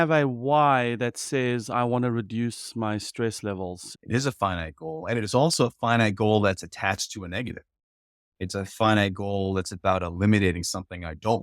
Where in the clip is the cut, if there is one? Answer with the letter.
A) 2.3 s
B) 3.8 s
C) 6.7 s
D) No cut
B